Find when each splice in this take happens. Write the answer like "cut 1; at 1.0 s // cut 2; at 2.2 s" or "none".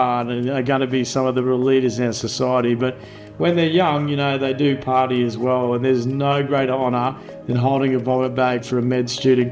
none